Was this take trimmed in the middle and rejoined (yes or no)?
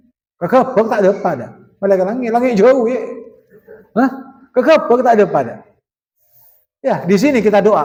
no